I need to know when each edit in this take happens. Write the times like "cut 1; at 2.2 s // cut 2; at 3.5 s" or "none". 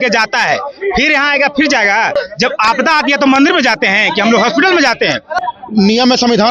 cut 1; at 2.1 s // cut 2; at 5.4 s